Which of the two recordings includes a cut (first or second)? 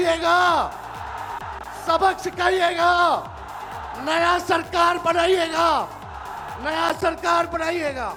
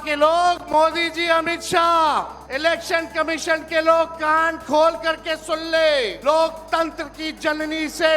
second